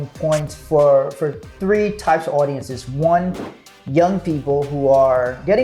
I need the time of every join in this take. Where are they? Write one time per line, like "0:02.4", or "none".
none